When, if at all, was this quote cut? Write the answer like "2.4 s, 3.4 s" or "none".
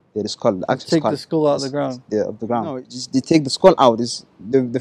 2.9 s